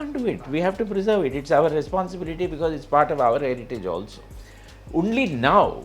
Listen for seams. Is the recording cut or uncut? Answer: uncut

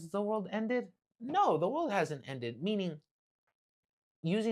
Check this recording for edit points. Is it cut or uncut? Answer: uncut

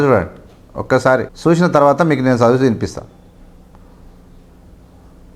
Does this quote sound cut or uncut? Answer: cut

